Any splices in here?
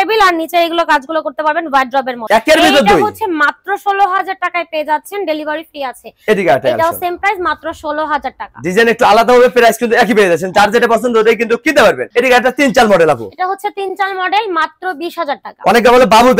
no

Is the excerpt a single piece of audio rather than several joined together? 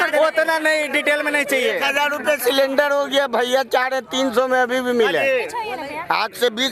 yes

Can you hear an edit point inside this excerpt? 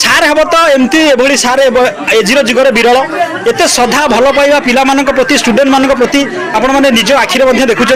no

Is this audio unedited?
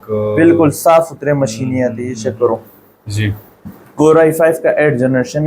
yes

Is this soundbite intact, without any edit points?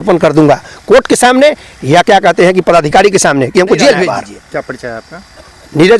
yes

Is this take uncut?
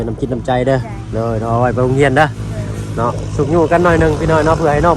yes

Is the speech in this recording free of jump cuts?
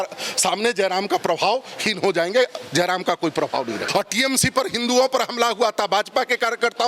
no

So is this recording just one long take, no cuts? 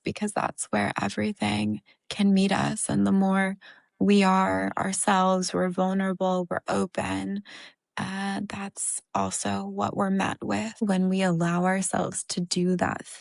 no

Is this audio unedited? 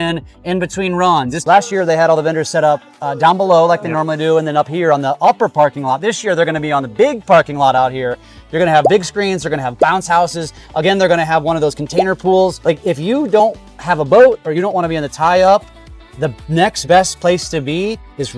no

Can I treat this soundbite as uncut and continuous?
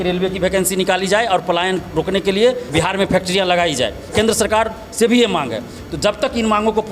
no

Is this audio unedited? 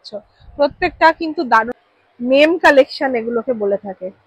no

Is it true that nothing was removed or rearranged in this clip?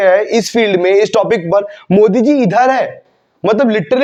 yes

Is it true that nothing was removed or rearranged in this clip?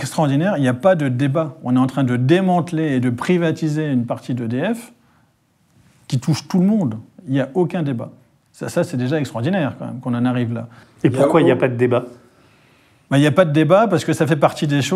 yes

